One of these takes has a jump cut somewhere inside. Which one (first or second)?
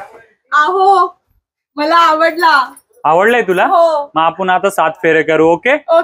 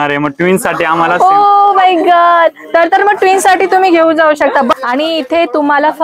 second